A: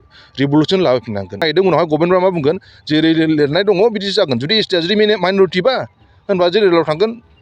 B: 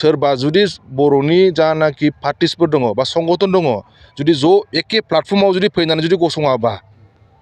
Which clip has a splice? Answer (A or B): A